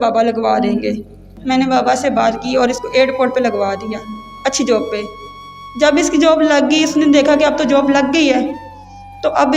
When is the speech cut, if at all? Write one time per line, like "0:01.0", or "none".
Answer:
0:01.3